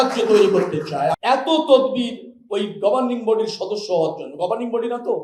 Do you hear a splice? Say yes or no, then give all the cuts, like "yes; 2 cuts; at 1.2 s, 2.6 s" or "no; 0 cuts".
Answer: yes; 1 cut; at 1.1 s